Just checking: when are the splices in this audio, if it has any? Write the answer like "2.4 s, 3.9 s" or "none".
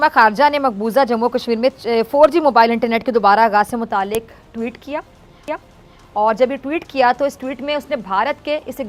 none

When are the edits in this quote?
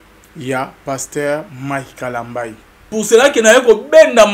2.9 s

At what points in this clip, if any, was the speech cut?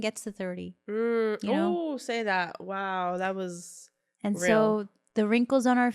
5.0 s

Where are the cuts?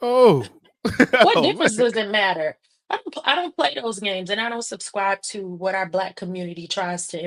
none

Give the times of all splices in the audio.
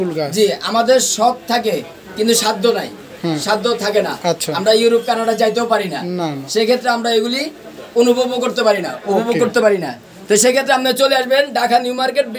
none

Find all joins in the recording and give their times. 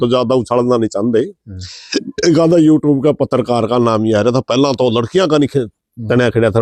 none

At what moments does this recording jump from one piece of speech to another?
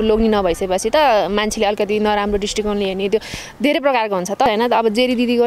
4.5 s

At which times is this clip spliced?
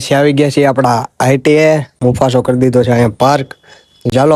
none

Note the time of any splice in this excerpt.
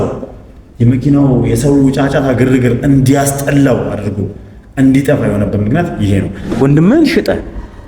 6.5 s

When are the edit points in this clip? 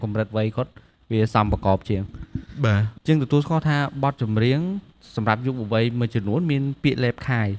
2.9 s

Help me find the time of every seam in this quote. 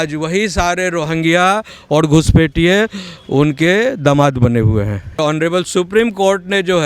5.2 s

